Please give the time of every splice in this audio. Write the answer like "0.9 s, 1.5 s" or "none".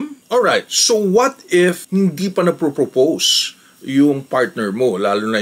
none